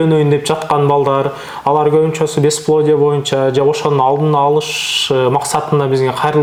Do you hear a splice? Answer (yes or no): no